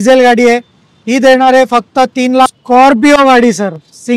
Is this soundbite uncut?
no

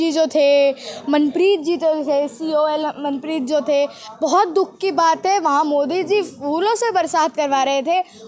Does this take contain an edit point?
no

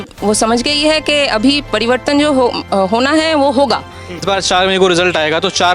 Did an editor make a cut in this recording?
yes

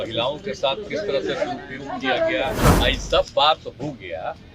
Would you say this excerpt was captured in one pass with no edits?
no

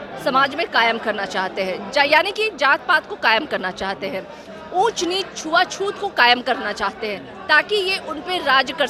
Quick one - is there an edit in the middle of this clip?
no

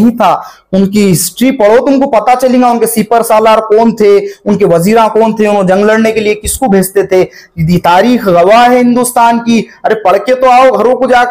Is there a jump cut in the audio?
no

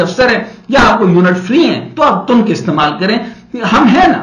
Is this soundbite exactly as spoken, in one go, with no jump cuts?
yes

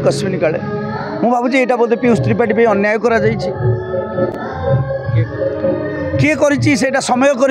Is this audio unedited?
yes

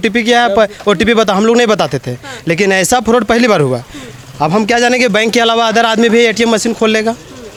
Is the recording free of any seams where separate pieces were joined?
yes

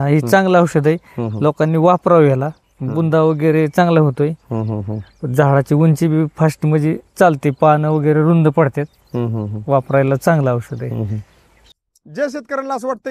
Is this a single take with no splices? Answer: no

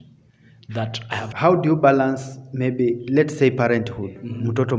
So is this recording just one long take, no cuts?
no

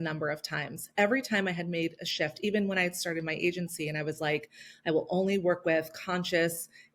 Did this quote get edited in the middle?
no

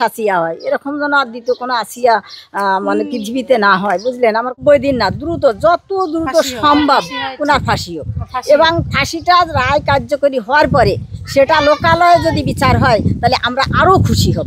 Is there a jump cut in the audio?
yes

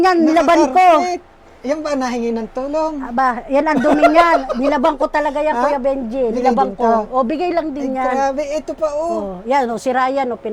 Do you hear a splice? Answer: no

